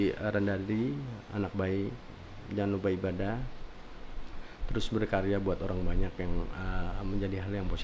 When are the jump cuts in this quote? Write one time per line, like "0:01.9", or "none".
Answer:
none